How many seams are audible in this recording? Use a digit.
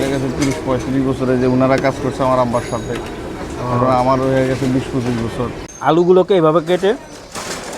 1